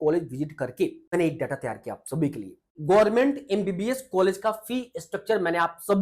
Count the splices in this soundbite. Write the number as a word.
two